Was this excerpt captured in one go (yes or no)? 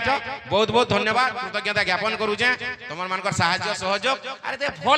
yes